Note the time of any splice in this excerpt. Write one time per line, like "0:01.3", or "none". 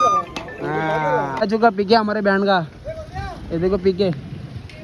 0:01.4